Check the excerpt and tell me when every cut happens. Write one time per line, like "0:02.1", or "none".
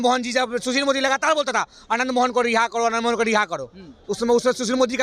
none